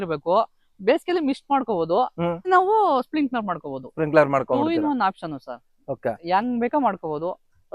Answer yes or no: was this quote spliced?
yes